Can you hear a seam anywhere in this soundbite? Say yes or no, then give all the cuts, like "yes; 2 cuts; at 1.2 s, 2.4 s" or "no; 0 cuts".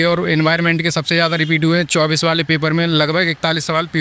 no; 0 cuts